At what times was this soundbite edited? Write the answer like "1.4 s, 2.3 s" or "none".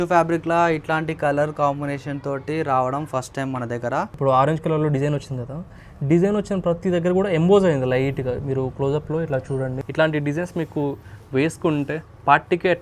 4.1 s, 9.8 s